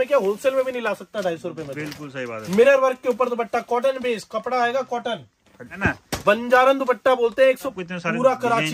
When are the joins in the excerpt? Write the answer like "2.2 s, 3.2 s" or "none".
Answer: 2.4 s, 5.7 s, 7.7 s